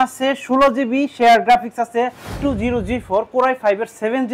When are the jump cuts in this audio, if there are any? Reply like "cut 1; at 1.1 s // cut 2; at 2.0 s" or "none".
cut 1; at 2.2 s